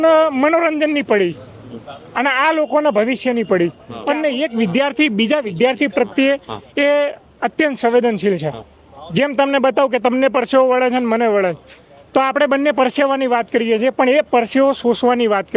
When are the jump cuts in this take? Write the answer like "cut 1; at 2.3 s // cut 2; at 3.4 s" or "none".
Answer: cut 1; at 3.9 s